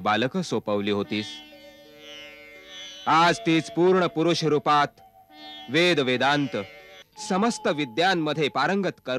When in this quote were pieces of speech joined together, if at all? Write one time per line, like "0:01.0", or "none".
0:07.0